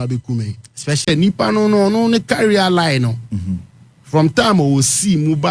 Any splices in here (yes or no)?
yes